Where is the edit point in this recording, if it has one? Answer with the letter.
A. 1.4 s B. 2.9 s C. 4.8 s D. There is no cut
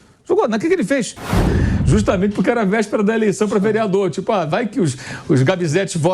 A